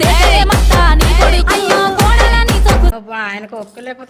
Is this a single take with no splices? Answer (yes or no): no